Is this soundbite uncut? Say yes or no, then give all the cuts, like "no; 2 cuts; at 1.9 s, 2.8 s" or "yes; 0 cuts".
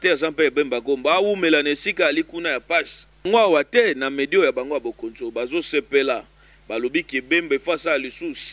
no; 1 cut; at 3.3 s